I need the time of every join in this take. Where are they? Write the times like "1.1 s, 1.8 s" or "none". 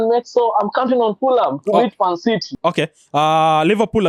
2.6 s